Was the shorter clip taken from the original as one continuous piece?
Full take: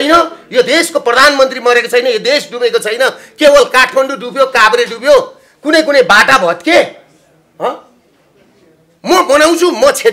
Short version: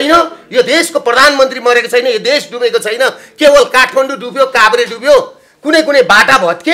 yes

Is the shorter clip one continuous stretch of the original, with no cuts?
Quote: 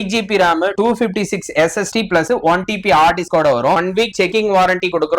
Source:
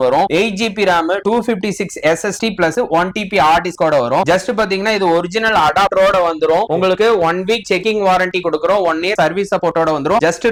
no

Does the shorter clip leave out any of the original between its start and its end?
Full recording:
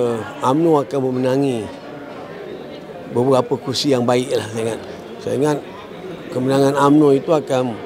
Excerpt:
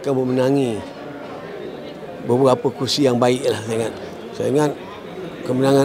no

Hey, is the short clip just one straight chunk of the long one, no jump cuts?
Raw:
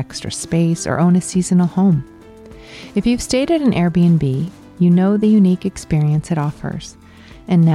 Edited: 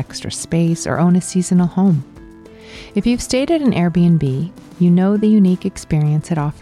yes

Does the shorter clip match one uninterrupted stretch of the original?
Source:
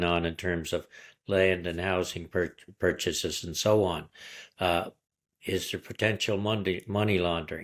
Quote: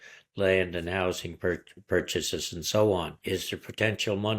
no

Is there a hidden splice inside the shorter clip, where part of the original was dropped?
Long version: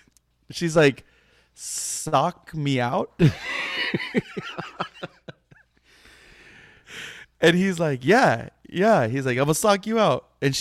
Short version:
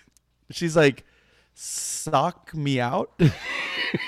no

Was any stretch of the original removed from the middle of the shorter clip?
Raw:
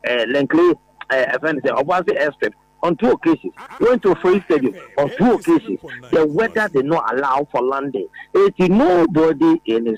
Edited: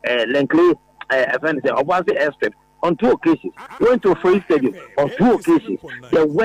no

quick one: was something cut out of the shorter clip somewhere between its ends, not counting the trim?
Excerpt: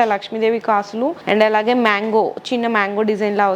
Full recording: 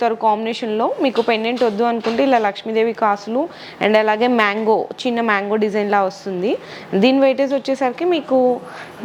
yes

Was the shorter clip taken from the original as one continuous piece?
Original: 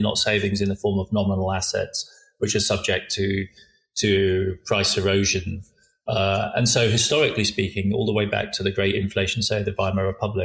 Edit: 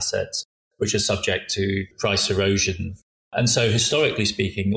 no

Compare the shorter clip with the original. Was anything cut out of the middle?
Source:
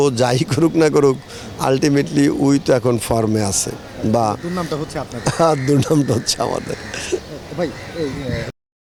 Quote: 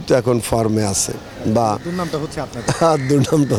no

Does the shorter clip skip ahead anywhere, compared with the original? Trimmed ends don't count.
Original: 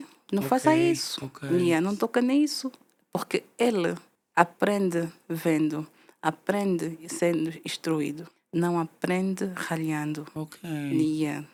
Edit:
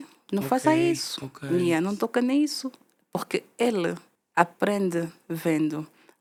no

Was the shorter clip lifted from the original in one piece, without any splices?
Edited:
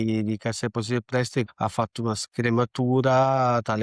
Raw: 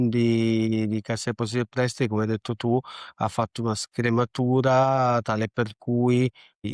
no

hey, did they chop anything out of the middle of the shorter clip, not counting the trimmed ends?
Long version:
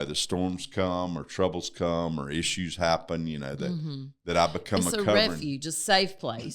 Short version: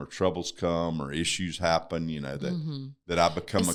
no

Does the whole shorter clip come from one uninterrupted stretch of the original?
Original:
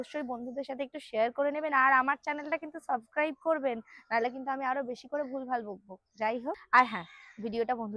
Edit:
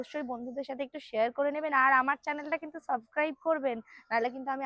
yes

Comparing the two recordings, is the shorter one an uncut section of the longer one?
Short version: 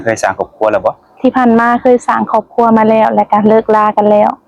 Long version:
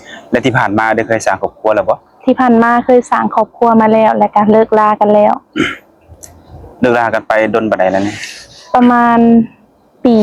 yes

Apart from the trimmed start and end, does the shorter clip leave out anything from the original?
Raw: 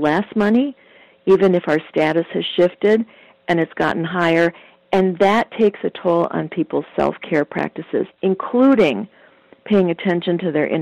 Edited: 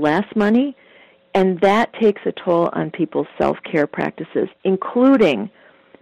yes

